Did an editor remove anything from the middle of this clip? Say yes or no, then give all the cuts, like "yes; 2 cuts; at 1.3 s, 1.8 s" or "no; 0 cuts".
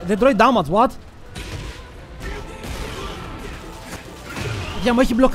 yes; 2 cuts; at 2.2 s, 4.0 s